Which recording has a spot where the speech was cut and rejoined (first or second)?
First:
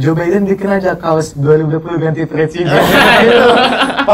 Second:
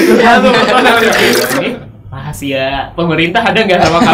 second